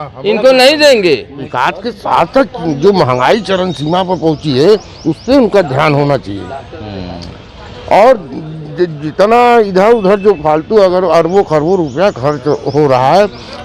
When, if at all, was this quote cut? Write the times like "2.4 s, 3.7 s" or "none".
1.4 s